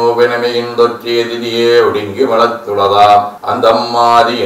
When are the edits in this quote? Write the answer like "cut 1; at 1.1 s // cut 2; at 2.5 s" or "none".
cut 1; at 3.4 s